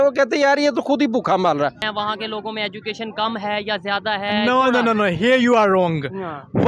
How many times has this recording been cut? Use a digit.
1